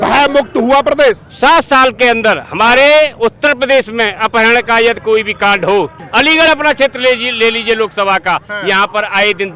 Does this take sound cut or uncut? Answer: cut